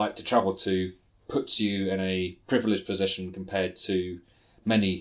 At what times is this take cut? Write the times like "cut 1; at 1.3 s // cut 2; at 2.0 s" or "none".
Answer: none